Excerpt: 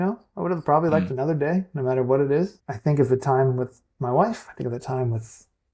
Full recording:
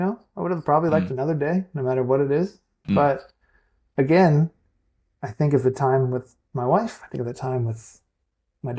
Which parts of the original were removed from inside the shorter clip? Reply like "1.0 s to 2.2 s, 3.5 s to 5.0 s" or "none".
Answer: 2.7 s to 5.2 s

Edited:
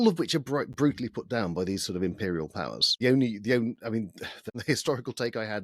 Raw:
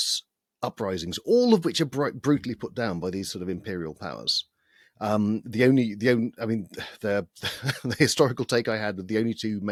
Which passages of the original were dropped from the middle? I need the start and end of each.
4.4 s to 5.5 s, 6.8 s to 7.6 s

